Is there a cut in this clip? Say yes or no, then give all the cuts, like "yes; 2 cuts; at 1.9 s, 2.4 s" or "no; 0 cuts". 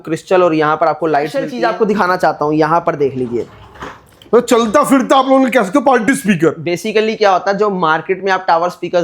yes; 1 cut; at 1.4 s